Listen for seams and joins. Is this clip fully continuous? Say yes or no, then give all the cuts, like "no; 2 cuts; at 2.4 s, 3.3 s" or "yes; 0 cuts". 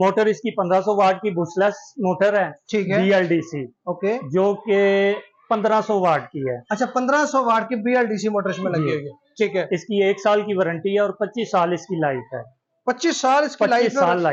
yes; 0 cuts